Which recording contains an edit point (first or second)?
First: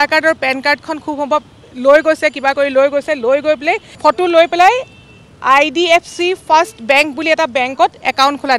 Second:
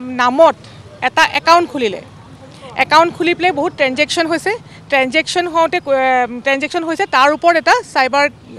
first